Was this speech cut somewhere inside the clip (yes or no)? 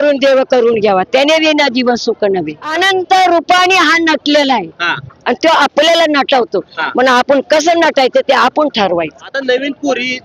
yes